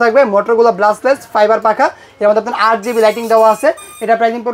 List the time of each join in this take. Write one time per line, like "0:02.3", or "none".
none

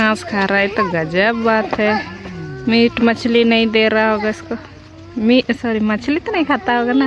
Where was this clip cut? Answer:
none

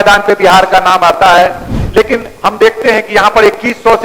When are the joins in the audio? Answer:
0:01.7

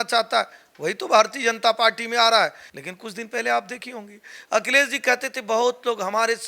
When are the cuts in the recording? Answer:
0:02.7

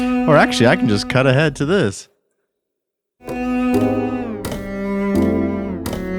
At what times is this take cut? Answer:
0:03.2

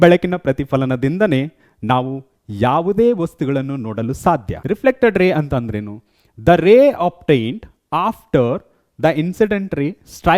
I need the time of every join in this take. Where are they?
0:04.5

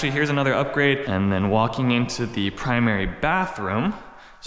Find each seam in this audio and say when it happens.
0:01.0

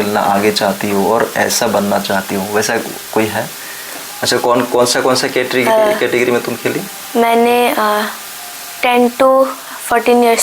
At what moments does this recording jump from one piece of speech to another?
0:04.1

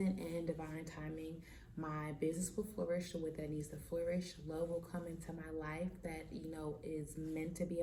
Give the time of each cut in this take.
none

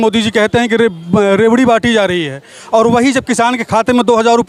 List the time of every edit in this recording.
none

